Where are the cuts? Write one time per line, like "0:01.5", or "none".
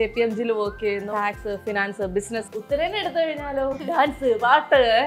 0:01.1
0:02.5
0:03.8